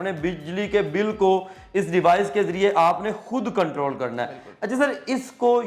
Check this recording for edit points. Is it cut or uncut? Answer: uncut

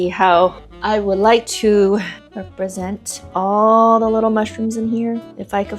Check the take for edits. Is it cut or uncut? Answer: uncut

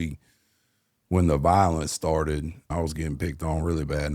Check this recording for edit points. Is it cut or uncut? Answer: cut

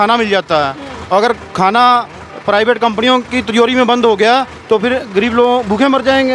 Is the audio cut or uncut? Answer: uncut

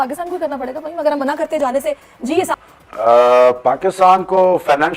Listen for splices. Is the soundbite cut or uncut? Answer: uncut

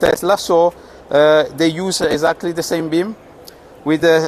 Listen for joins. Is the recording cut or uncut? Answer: uncut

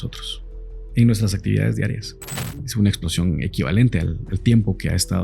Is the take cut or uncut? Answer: cut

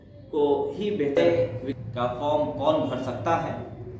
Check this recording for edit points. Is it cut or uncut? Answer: cut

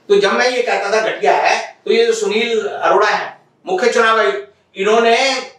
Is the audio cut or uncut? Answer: uncut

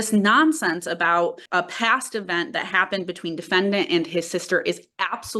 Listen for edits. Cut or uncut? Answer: cut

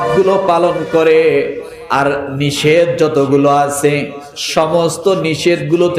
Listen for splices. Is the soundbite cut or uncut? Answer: uncut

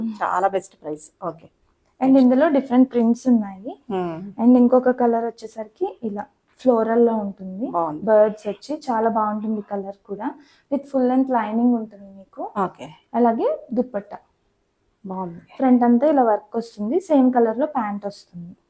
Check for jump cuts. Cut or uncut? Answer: uncut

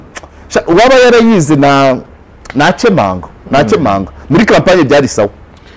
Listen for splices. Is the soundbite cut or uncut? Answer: uncut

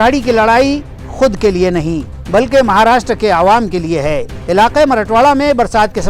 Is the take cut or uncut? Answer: uncut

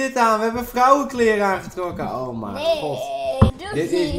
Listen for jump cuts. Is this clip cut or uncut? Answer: uncut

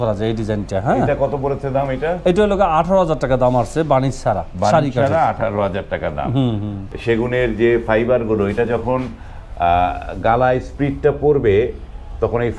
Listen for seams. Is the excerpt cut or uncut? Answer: cut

